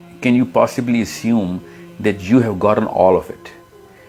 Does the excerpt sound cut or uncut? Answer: uncut